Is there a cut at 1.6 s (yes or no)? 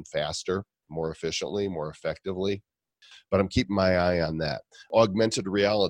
no